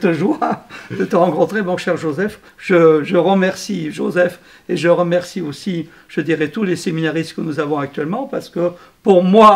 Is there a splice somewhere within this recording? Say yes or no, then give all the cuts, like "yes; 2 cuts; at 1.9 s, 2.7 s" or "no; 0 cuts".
yes; 1 cut; at 2.5 s